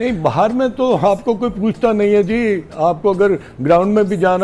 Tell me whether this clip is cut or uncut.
uncut